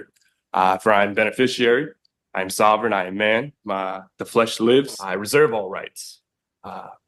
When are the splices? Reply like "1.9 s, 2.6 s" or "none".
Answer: 5.1 s